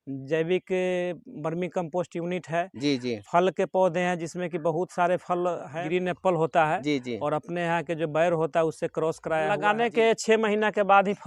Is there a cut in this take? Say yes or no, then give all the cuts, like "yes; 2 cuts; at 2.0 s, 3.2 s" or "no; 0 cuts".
yes; 2 cuts; at 5.7 s, 9.6 s